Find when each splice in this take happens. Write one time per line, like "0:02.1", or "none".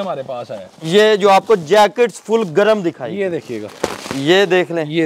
0:03.8